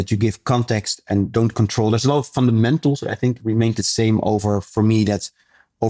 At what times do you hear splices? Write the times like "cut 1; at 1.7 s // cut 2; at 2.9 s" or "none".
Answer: none